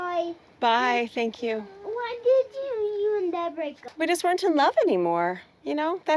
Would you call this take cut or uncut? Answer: cut